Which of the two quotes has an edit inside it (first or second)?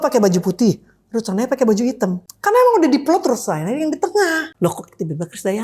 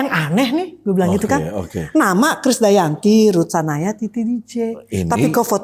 first